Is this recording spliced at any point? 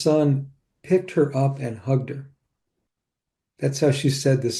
no; 0 cuts

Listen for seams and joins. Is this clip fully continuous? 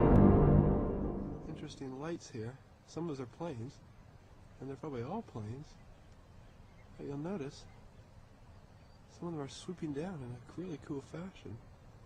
yes; 0 cuts

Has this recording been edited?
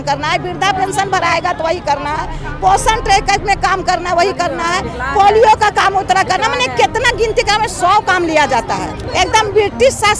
yes; 1 cut; at 9.0 s

